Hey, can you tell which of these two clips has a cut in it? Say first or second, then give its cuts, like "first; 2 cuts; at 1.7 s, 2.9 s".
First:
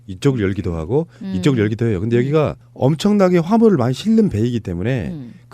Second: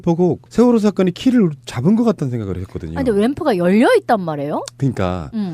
first; 1 cut; at 2.3 s